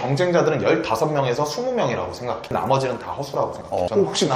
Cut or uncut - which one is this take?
cut